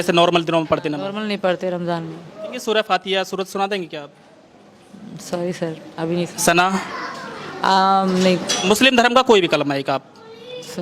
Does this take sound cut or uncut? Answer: cut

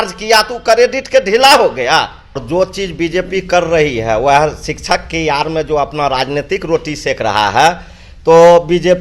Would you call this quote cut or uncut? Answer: cut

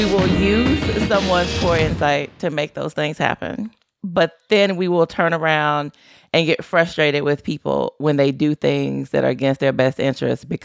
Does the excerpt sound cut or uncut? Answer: uncut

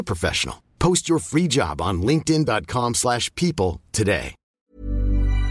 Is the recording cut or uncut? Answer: cut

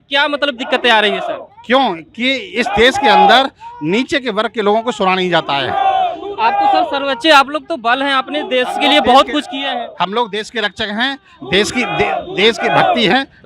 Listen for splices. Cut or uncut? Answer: uncut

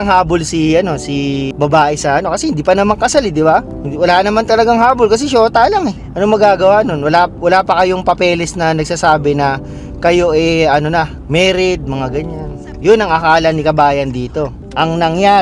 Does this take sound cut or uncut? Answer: cut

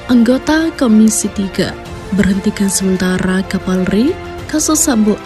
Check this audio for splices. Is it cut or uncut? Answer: uncut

